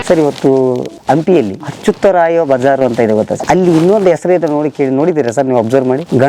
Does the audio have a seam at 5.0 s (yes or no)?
no